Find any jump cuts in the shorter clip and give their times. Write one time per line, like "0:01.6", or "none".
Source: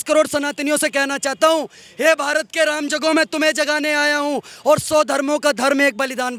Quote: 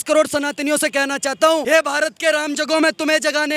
0:01.6